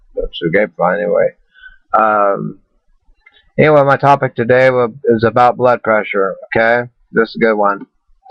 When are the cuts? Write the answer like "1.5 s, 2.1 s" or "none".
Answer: 4.1 s